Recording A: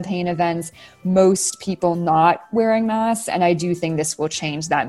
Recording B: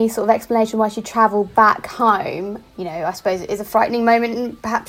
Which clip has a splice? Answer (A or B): B